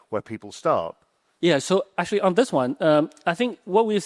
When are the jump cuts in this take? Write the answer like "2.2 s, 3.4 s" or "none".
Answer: none